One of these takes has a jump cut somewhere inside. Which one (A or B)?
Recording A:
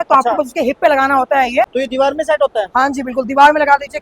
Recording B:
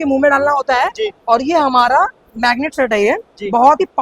A